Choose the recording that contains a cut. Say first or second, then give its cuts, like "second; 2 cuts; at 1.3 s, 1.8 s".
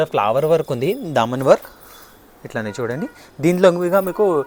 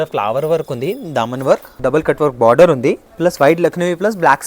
second; 2 cuts; at 1.8 s, 3.1 s